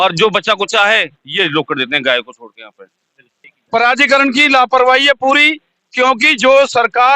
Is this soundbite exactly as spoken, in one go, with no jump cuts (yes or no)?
no